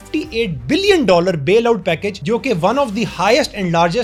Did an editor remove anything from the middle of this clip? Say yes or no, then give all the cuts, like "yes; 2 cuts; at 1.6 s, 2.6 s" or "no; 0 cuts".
no; 0 cuts